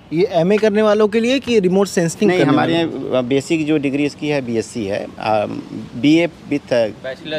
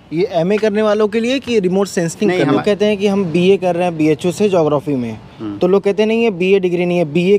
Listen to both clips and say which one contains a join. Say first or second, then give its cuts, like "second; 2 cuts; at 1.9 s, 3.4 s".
second; 1 cut; at 2.6 s